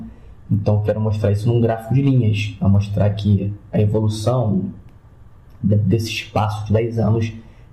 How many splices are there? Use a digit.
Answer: 1